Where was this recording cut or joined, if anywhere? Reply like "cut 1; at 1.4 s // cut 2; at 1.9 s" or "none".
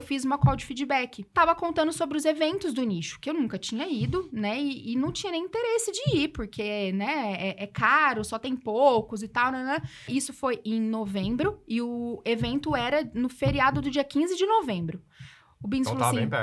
cut 1; at 1.3 s // cut 2; at 10.1 s